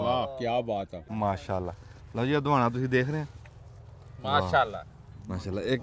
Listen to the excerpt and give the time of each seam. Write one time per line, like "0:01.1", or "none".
0:01.1